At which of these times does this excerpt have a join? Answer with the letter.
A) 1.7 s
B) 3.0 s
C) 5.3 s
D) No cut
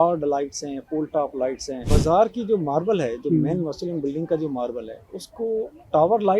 A